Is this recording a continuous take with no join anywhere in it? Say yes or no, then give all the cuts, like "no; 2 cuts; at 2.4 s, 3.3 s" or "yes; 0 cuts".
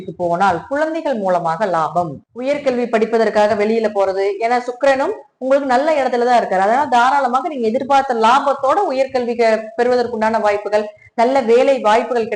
no; 1 cut; at 2.2 s